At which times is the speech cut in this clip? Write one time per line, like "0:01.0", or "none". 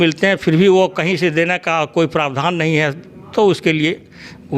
none